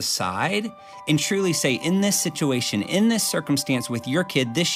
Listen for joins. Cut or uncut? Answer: uncut